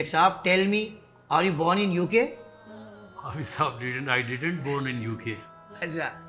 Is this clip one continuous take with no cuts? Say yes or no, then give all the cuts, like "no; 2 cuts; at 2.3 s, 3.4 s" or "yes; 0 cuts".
yes; 0 cuts